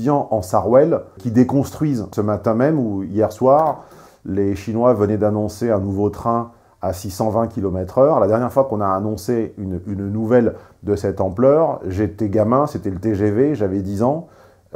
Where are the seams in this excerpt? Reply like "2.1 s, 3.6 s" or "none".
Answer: 1.2 s, 2.1 s